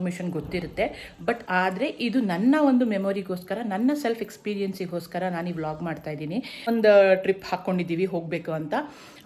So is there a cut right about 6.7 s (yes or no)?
yes